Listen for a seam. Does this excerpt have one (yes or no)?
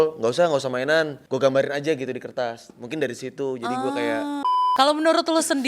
yes